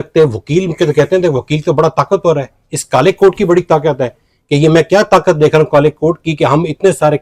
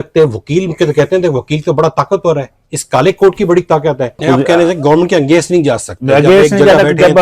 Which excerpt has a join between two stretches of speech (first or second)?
second